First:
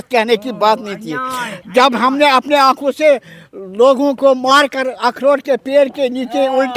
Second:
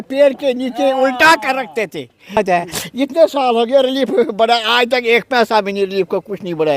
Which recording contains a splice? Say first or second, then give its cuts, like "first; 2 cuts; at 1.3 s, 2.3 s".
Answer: second; 1 cut; at 2.4 s